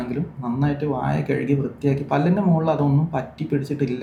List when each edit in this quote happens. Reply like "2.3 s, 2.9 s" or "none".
none